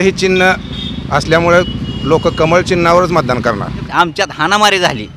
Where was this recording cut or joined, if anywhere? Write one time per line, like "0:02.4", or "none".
0:03.8